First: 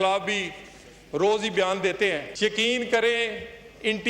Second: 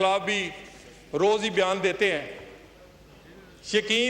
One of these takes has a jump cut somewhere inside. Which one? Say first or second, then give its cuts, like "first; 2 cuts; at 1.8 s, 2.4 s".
first; 1 cut; at 2.3 s